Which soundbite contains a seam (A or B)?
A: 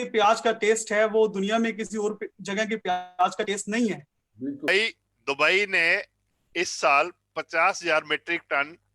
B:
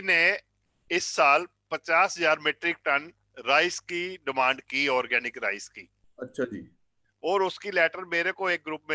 A